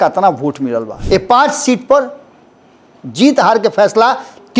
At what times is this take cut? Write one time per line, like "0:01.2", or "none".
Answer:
0:00.9